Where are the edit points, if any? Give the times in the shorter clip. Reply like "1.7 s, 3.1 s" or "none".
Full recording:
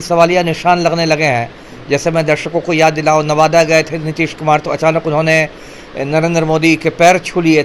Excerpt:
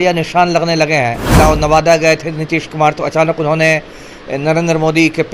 1.3 s